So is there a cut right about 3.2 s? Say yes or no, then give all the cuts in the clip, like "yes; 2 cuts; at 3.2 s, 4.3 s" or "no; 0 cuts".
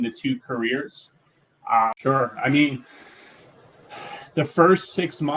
no; 1 cut; at 2.0 s